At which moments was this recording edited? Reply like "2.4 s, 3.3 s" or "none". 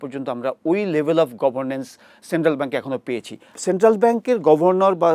3.5 s